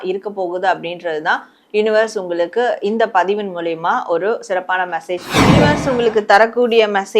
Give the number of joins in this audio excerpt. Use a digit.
1